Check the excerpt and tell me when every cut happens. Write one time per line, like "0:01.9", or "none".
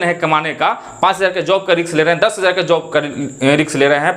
none